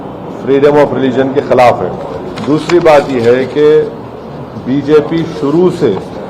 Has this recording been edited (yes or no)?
yes